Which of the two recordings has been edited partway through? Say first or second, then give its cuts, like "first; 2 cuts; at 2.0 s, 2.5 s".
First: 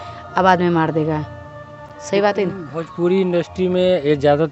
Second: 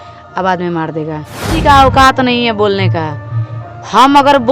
second; 1 cut; at 1.5 s